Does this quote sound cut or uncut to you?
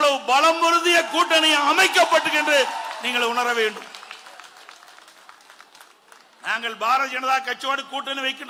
uncut